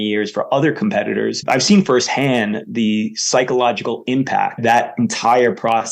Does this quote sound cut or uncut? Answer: cut